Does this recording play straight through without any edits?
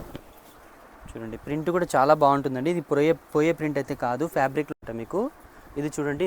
no; 1 cut; at 4.7 s

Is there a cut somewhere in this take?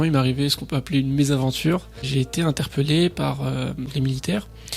yes; 2 cuts; at 2.0 s, 3.9 s

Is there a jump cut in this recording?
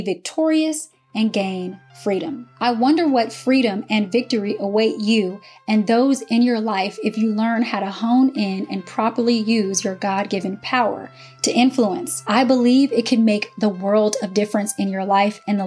yes; 1 cut; at 12.1 s

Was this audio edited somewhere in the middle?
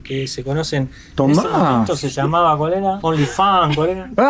no; 0 cuts

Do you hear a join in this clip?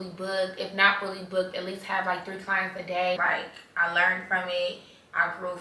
yes; 1 cut; at 3.2 s

